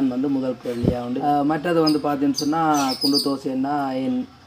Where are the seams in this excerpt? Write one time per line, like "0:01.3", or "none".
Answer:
0:01.2